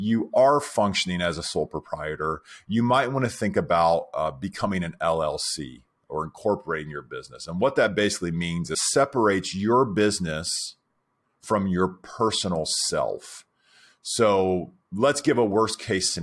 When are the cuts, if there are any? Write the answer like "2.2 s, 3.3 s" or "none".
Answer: 8.8 s